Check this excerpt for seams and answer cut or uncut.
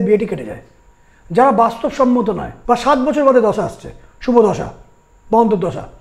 cut